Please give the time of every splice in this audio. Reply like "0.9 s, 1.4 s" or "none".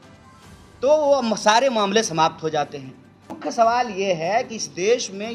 3.3 s